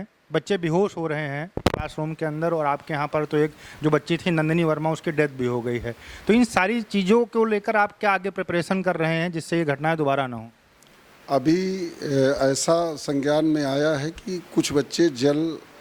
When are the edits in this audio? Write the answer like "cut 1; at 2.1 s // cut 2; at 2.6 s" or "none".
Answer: none